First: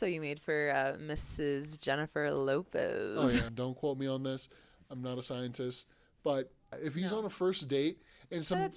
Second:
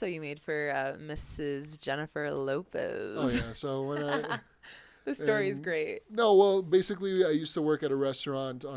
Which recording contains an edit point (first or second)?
first